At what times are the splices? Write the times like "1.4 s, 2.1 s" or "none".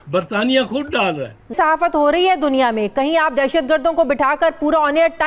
1.5 s